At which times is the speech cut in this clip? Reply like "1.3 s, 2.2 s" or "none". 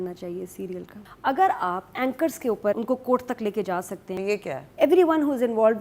1.0 s, 2.8 s, 4.0 s